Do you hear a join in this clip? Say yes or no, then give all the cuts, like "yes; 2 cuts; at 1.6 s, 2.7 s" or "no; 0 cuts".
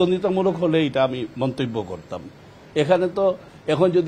no; 0 cuts